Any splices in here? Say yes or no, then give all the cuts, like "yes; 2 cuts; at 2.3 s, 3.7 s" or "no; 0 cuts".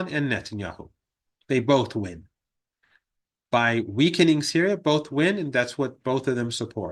no; 0 cuts